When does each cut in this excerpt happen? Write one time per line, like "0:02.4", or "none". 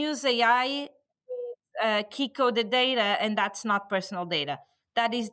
none

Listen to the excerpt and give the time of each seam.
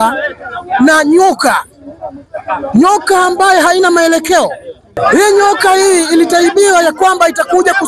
0:04.9

